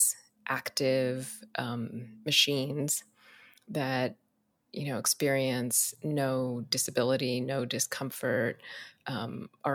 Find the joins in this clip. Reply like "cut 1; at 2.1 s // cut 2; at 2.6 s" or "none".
none